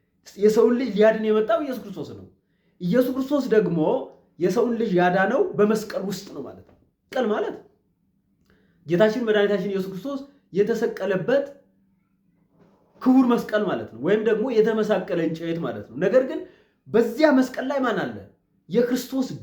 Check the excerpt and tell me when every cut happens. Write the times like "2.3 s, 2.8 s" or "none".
7.1 s